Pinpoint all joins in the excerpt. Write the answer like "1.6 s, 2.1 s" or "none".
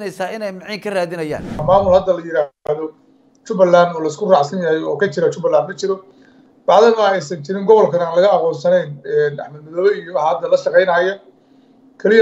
1.6 s